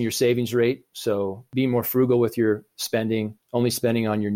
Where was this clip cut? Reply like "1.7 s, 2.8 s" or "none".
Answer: 3.4 s